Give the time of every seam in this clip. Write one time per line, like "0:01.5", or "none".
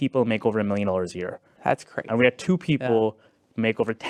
none